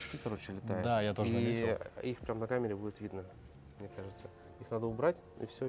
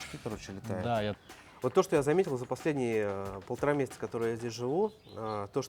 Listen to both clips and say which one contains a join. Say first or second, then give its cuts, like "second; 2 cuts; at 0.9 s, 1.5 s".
second; 1 cut; at 1.2 s